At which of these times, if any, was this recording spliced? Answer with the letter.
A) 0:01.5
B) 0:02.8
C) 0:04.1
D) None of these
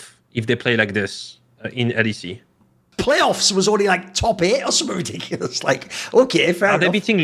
B